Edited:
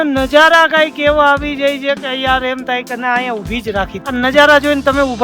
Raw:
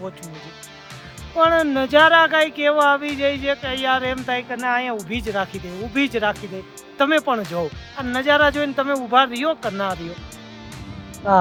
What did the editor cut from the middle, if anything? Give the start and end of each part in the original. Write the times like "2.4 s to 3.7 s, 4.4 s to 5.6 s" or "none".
5.6 s to 7.9 s